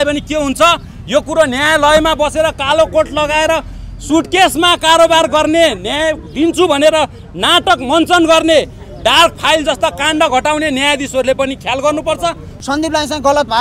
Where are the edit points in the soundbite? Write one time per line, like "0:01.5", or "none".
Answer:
0:12.5